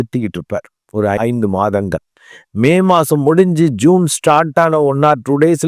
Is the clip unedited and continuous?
no; 1 cut; at 1.2 s

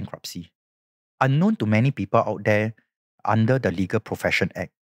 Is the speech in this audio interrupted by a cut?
no; 0 cuts

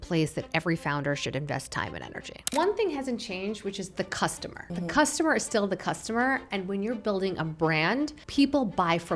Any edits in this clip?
yes; 3 cuts; at 2.5 s, 4.5 s, 8.2 s

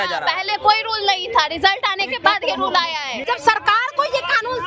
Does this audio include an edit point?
yes; 1 cut; at 3.1 s

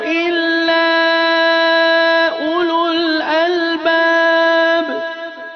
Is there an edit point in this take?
no; 0 cuts

